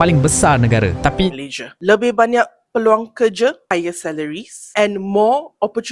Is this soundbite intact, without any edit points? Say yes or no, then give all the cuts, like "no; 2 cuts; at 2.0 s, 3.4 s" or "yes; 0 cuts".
no; 1 cut; at 1.3 s